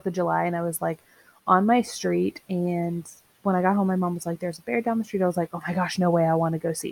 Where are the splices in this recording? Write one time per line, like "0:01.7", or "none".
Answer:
0:03.2